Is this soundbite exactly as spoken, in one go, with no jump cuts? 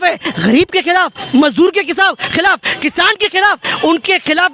yes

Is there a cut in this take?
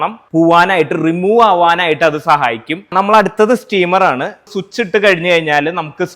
no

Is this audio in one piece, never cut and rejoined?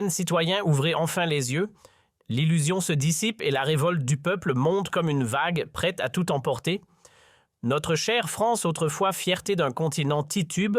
no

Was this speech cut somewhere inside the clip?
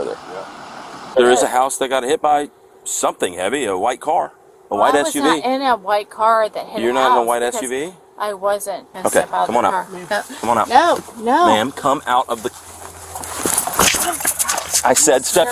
yes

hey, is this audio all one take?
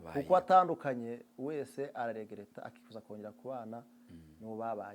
yes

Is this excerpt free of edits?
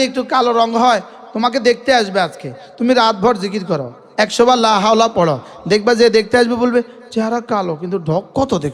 yes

